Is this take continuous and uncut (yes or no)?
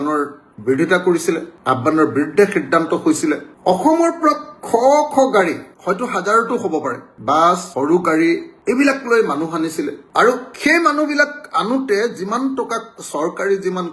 yes